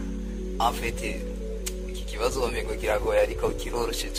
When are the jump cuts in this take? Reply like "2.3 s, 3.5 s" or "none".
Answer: none